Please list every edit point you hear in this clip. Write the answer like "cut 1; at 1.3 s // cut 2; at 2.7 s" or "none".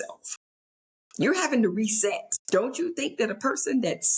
cut 1; at 2.3 s